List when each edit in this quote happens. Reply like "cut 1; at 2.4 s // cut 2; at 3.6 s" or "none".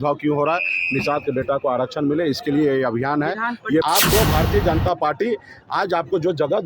cut 1; at 3.8 s